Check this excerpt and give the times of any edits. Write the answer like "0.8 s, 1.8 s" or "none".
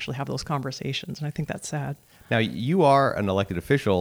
none